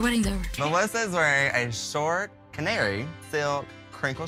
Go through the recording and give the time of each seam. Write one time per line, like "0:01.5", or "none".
none